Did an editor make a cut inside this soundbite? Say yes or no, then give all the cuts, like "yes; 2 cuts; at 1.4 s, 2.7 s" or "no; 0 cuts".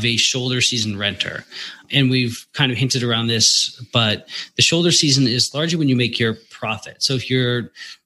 yes; 1 cut; at 1.8 s